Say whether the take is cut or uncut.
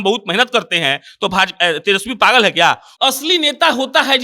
cut